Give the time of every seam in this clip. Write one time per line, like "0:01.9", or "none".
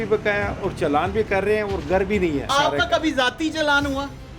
0:02.5